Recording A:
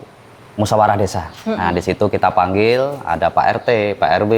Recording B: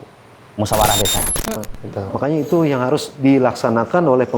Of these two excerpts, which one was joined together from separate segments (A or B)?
B